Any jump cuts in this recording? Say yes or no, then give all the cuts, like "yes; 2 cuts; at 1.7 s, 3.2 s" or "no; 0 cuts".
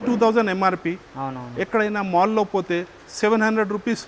no; 0 cuts